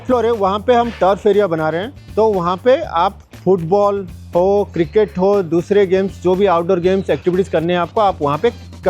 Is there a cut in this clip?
no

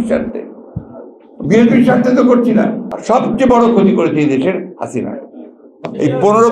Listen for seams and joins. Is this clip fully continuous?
no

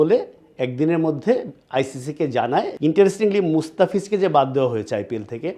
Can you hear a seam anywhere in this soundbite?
yes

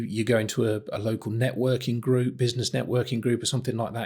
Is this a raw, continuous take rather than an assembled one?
yes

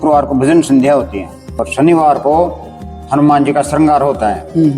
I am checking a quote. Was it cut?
yes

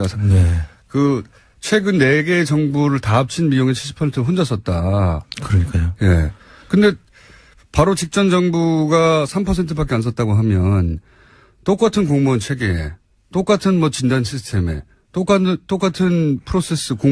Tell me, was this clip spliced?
yes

